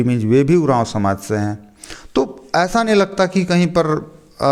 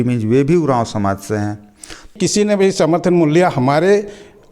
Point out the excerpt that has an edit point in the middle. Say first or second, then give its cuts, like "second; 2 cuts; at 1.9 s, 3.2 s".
second; 1 cut; at 2.1 s